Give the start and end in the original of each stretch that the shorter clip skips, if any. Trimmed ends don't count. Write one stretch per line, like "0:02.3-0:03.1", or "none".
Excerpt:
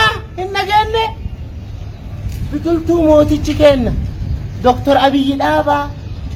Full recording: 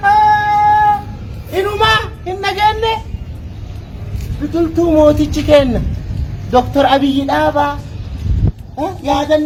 none